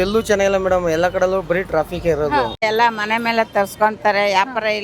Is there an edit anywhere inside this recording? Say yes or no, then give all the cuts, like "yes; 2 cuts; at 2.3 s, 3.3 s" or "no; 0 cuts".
yes; 1 cut; at 2.6 s